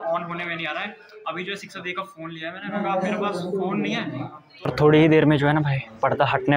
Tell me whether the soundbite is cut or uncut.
cut